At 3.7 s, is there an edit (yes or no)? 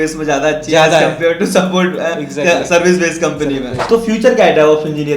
yes